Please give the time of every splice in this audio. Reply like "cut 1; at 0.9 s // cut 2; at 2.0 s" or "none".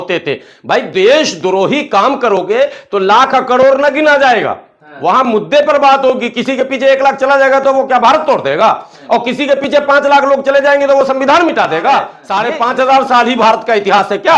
cut 1; at 12.2 s